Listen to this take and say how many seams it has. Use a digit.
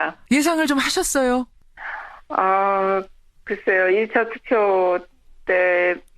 1